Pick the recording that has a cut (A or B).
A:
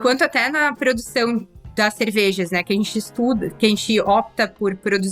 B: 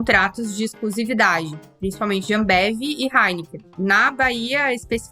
B